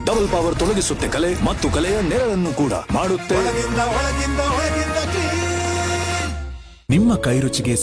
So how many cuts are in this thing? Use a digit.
1